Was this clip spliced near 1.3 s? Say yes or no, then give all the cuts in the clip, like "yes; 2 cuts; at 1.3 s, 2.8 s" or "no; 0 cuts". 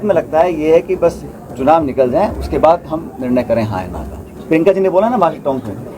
no; 1 cut; at 4.4 s